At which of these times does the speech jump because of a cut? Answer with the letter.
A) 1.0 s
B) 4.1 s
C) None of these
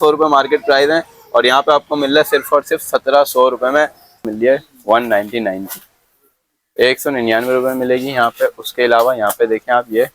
B